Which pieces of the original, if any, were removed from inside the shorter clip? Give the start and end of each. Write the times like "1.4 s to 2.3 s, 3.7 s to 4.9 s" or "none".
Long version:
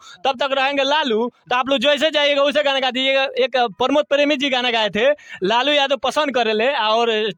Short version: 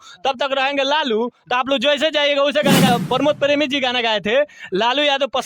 2.9 s to 3.6 s

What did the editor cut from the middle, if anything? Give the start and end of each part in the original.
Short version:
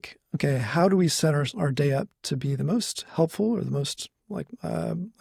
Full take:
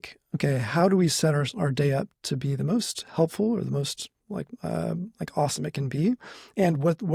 none

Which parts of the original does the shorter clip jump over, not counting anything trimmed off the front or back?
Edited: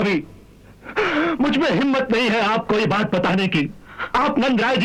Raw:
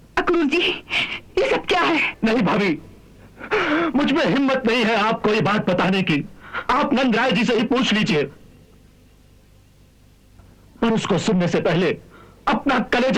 none

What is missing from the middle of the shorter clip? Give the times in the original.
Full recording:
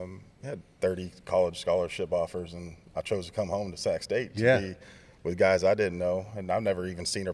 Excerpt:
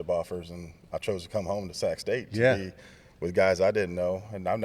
none

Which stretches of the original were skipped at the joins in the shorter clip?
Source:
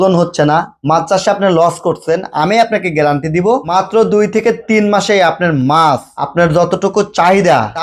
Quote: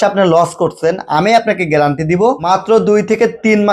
none

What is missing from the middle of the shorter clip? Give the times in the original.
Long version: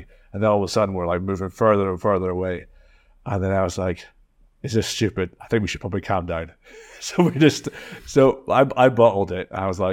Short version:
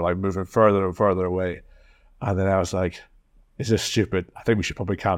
none

